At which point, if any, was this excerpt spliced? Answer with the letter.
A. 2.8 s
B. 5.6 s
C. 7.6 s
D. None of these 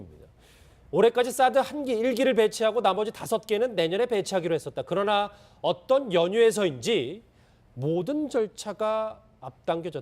C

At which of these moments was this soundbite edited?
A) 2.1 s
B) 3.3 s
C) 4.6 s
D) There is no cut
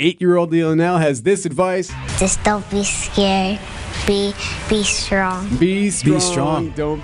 A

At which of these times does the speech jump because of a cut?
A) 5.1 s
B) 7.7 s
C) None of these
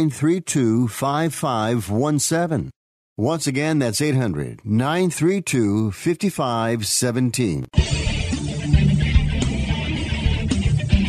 B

